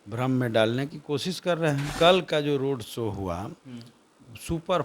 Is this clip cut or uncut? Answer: cut